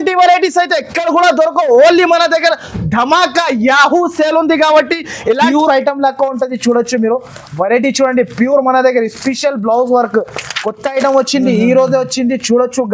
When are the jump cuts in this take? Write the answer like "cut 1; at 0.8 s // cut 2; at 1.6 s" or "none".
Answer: cut 1; at 5.4 s